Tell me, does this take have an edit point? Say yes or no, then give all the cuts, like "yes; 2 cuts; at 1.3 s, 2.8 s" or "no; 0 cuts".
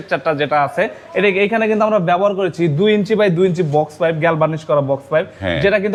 no; 0 cuts